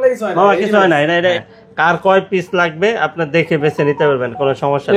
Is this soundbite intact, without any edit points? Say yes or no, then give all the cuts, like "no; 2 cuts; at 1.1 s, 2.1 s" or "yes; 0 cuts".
no; 1 cut; at 1.4 s